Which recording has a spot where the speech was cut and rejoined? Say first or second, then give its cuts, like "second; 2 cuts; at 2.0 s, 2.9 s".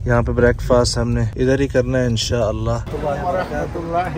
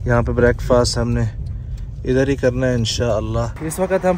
first; 2 cuts; at 1.3 s, 2.9 s